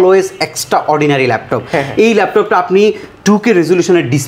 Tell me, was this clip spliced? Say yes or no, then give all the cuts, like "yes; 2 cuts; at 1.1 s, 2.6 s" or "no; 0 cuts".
no; 0 cuts